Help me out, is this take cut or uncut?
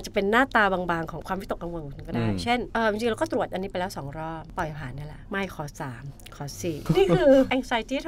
cut